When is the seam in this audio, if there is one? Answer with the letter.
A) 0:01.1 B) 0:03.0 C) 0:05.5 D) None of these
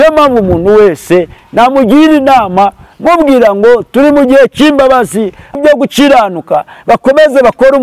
C